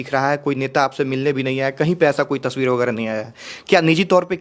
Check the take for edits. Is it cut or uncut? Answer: uncut